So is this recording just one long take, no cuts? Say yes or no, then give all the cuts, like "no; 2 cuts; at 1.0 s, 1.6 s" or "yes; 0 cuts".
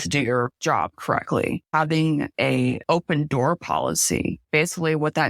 no; 2 cuts; at 1.6 s, 2.8 s